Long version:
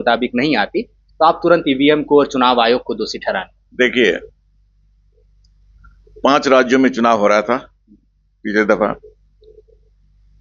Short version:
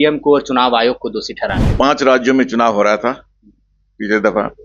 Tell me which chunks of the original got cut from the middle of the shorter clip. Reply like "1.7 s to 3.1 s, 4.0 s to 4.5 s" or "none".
3.5 s to 6.1 s